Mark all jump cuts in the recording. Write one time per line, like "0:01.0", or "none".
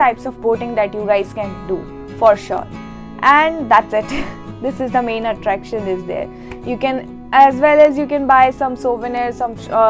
none

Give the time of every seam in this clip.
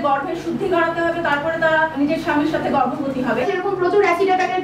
0:01.9
0:03.4

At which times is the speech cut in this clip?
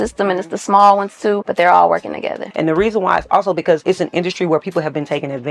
0:01.5
0:02.4
0:03.8

